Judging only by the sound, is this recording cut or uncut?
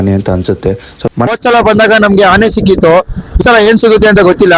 cut